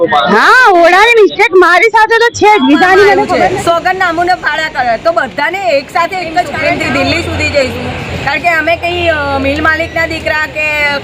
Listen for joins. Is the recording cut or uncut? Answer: cut